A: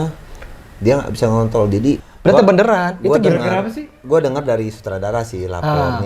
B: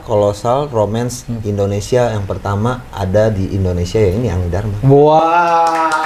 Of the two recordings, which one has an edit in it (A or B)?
A